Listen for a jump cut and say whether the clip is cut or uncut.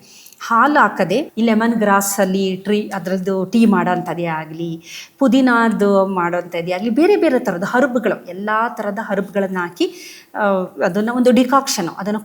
cut